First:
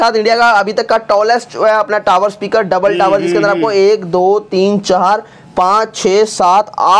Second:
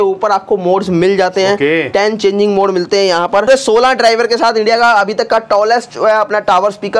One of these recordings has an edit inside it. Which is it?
second; 1 cut; at 3.5 s

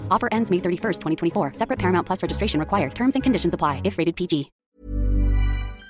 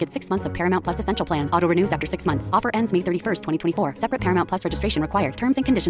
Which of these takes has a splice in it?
first; 1 cut; at 4.5 s

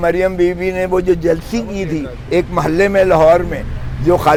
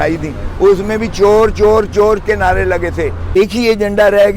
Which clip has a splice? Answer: second; 1 cut; at 3.4 s

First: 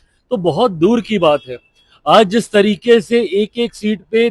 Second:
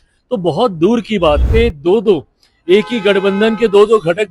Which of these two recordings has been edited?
second; 1 cut; at 1.4 s

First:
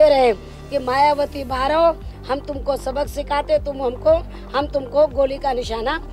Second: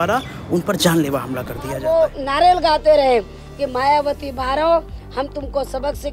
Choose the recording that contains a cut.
second; 1 cut; at 1.7 s

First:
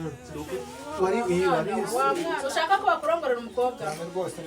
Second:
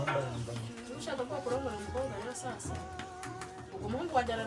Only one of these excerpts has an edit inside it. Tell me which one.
first; 1 cut; at 2.4 s

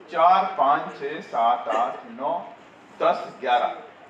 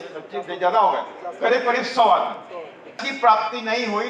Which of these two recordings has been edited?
second; 1 cut; at 3.0 s

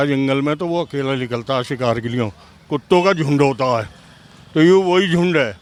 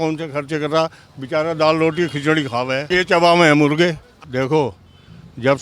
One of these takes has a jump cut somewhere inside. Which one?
second; 2 cuts; at 2.9 s, 4.1 s

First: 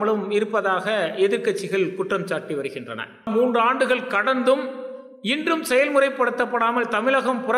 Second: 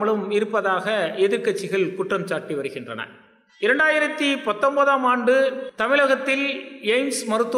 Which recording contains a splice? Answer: first; 1 cut; at 3.2 s

